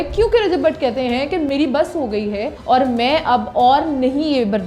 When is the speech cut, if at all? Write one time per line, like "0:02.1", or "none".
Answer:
0:01.5
0:02.5

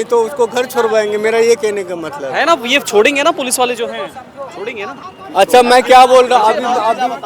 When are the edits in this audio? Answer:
none

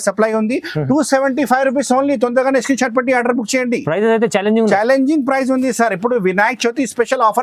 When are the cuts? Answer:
none

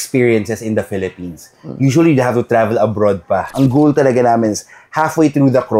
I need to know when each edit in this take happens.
0:03.5

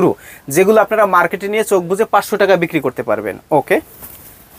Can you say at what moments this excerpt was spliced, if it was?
none

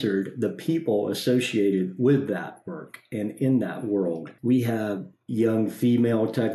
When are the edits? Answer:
0:04.3
0:05.1

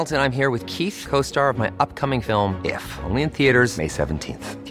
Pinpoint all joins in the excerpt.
none

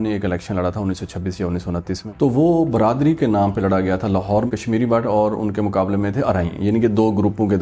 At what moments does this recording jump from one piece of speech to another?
none

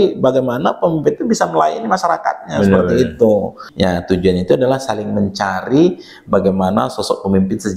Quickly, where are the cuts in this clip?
0:03.6

